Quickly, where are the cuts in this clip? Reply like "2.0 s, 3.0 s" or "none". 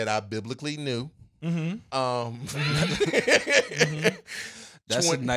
none